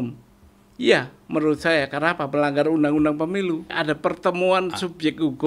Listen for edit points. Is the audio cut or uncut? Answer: cut